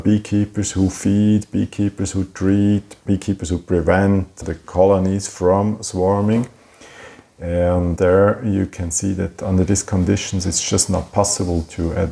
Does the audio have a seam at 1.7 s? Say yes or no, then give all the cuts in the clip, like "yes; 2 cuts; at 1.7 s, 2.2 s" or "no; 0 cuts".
no; 1 cut; at 2.9 s